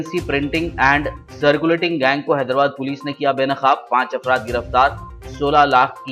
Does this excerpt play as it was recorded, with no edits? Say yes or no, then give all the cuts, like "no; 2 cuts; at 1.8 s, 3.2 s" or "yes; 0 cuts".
yes; 0 cuts